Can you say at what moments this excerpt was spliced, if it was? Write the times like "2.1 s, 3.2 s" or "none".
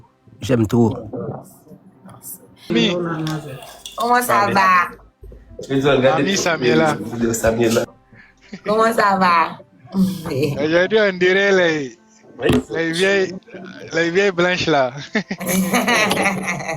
2.7 s